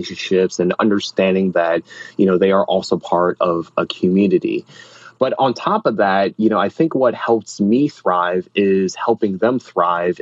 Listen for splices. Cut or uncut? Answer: uncut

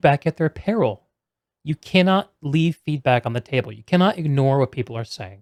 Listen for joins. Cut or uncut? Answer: uncut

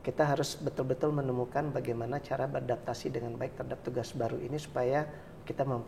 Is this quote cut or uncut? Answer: uncut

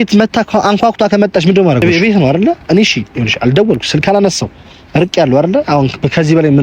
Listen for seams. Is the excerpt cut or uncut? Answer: cut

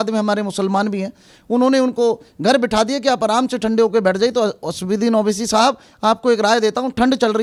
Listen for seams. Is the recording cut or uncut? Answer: uncut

